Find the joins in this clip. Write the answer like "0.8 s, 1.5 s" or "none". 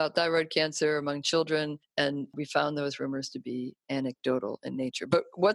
1.8 s